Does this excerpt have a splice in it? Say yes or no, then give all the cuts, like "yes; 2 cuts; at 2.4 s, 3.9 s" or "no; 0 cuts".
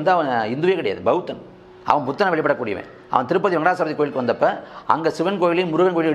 no; 0 cuts